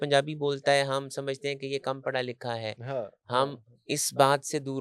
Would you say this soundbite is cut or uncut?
uncut